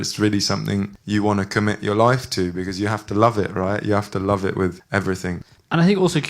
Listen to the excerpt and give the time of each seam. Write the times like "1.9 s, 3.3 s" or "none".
1.0 s, 5.2 s